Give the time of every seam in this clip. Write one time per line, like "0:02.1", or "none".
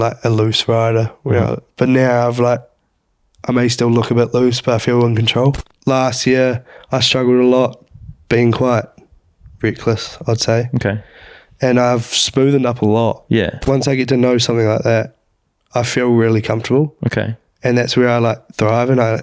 0:05.7
0:13.6

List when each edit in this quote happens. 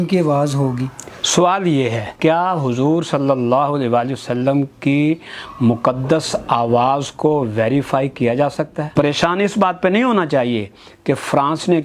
0:02.1
0:08.9

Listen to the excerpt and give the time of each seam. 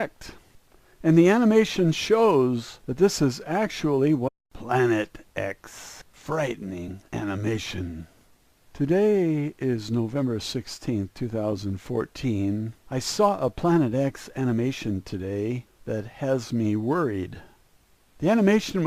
none

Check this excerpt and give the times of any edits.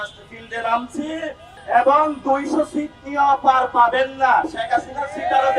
0:01.5

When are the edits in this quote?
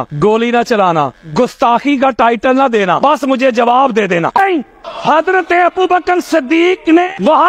0:04.4

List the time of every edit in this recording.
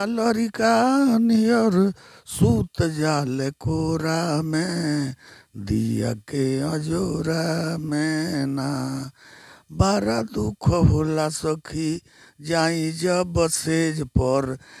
none

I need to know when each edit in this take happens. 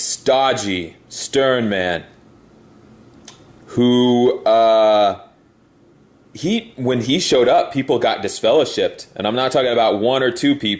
0:04.3

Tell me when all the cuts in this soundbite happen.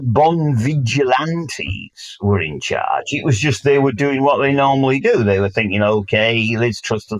none

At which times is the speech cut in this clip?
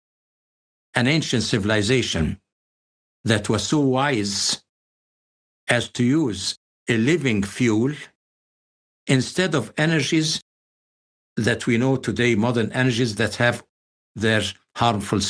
none

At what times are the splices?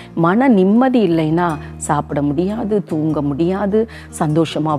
none

